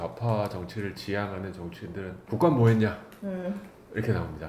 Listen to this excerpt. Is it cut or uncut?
uncut